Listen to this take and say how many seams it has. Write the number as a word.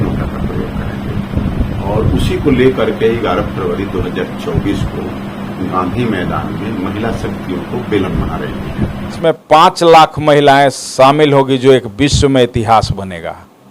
one